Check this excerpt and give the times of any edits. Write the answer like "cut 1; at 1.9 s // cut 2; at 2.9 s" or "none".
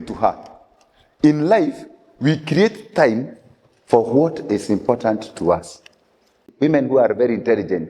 cut 1; at 6.4 s